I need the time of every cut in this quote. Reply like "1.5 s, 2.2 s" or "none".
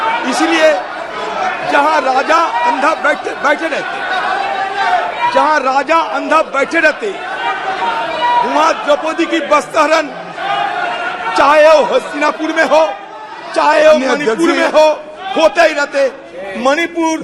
none